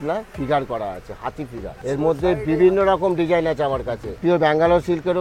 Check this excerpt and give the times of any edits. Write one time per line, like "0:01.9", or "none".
0:01.7
0:04.2

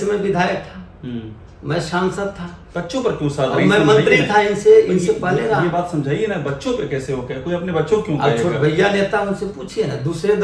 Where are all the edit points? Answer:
none

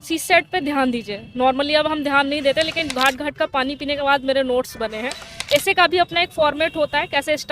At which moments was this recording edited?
0:02.8
0:05.3

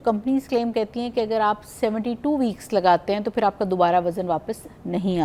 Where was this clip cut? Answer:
none

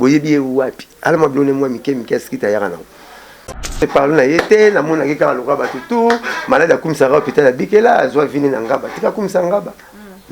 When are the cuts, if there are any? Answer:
0:03.8

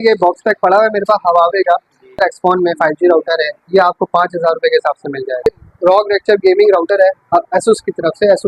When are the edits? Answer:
0:02.2
0:05.5

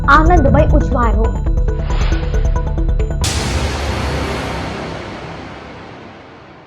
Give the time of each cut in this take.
0:03.2

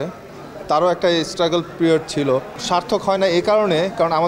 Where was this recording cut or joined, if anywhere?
0:02.5

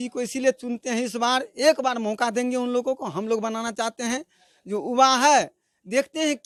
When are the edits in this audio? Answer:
none

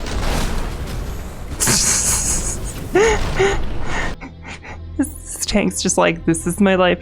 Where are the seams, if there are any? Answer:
0:04.1

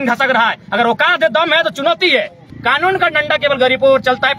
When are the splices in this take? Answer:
0:02.5

